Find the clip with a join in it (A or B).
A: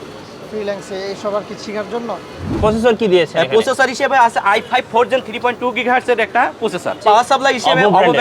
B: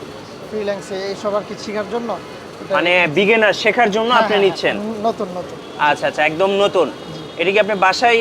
A